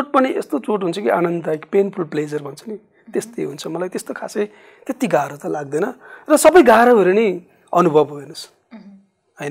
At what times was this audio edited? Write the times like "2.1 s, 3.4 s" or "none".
none

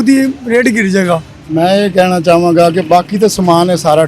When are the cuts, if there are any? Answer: 1.4 s

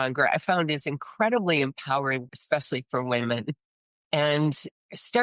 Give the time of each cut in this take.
2.3 s

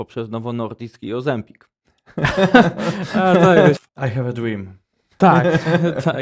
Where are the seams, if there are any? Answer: 3.8 s

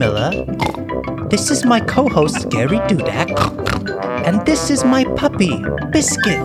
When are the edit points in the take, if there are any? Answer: none

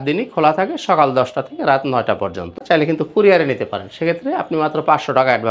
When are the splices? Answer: 2.6 s

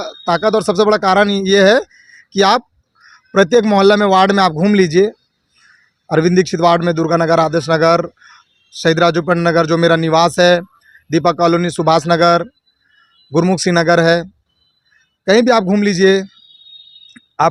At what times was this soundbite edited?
none

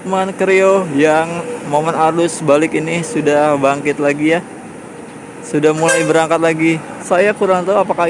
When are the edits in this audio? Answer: 6.9 s

